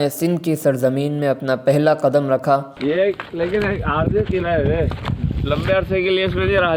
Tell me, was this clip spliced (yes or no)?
yes